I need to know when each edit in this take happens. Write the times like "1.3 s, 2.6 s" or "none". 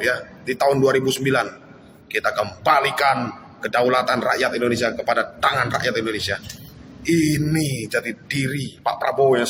none